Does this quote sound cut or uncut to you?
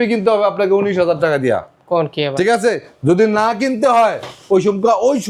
uncut